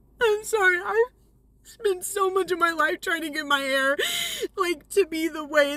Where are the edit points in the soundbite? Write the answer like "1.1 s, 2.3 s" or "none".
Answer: none